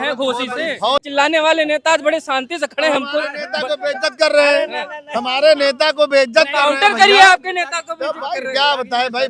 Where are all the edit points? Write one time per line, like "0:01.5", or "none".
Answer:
0:01.0